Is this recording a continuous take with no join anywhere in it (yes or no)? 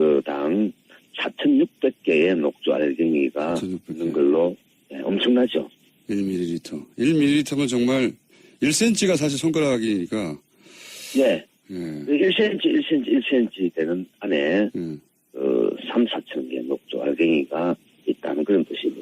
no